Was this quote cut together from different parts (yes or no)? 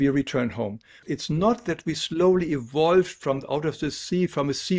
yes